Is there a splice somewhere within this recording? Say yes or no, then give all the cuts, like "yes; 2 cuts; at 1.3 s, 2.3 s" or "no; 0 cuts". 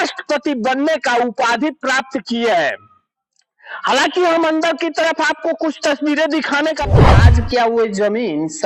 yes; 1 cut; at 7.0 s